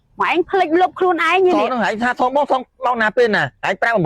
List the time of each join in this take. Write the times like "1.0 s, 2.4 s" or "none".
1.7 s